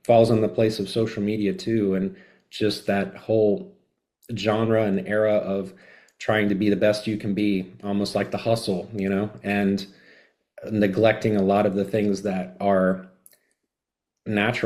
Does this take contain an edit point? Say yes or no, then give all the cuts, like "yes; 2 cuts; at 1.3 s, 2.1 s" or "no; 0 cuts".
no; 0 cuts